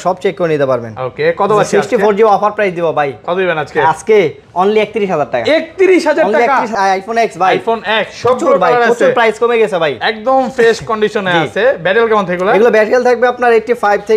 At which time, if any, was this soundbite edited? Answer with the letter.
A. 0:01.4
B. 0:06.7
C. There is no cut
B